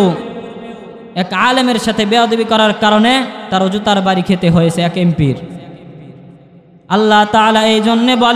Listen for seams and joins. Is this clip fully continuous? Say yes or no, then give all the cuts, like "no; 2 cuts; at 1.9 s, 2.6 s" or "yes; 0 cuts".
yes; 0 cuts